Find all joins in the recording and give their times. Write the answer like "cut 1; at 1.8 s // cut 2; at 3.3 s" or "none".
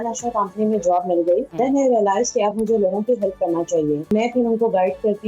cut 1; at 1.5 s // cut 2; at 4.1 s